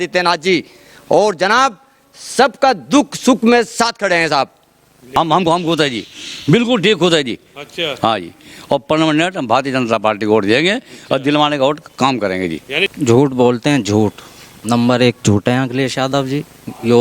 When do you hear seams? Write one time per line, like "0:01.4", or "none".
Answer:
0:05.2
0:12.9